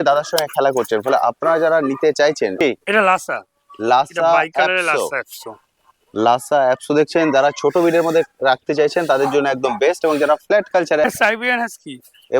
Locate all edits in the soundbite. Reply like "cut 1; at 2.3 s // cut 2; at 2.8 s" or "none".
cut 1; at 2.6 s // cut 2; at 11.0 s